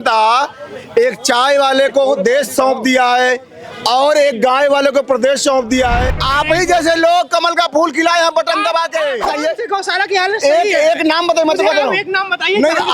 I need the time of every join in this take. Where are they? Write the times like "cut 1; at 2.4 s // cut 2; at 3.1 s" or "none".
cut 1; at 6.1 s // cut 2; at 9.3 s